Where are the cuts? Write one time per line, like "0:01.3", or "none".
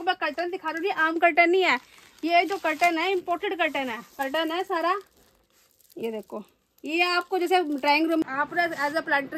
0:04.1
0:08.2